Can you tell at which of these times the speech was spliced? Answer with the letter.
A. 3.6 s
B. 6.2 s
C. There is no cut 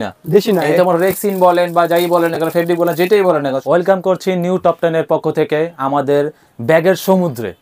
A